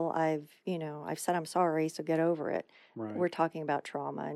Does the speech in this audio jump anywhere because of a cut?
no; 0 cuts

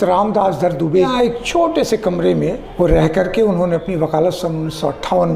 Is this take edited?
yes; 2 cuts; at 1.1 s, 2.6 s

